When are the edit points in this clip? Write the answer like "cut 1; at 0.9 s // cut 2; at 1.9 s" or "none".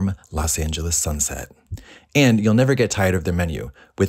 none